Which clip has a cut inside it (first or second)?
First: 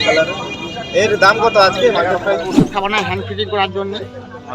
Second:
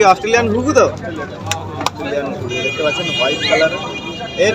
first